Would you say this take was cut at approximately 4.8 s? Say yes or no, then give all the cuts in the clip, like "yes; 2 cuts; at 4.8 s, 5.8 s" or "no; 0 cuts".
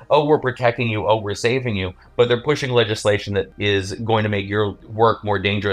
yes; 2 cuts; at 3.5 s, 4.8 s